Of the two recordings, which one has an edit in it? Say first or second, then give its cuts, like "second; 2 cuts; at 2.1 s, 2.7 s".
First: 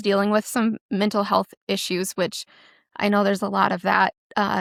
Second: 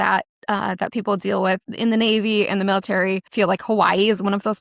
second; 2 cuts; at 1.7 s, 3.3 s